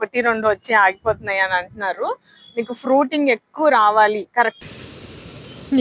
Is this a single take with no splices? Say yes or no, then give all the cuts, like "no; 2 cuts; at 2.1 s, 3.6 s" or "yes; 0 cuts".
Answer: no; 1 cut; at 4.6 s